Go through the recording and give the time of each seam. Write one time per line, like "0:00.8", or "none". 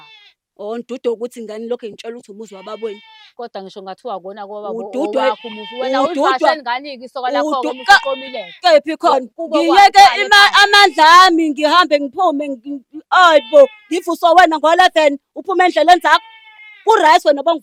none